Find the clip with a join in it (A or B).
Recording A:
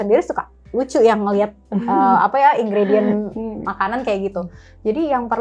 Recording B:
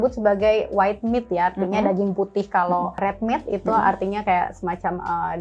B